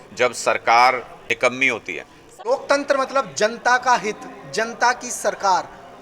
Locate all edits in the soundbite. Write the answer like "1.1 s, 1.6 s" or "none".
1.1 s, 2.3 s